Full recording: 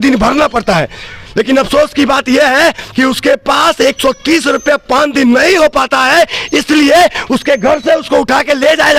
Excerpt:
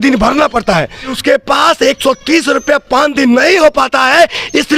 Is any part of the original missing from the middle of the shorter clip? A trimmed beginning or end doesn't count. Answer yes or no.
yes